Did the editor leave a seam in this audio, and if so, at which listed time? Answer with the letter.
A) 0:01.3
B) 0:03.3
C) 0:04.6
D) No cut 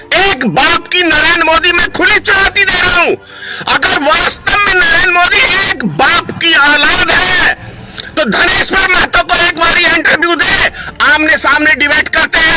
D